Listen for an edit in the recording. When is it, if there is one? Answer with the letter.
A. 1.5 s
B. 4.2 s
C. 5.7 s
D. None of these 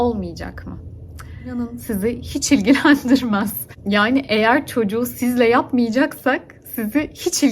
A